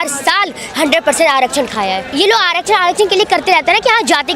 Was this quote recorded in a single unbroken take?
no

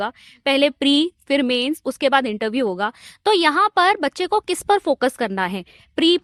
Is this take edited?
no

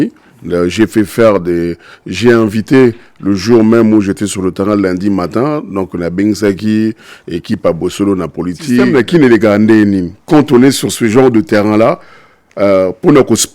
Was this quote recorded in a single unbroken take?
no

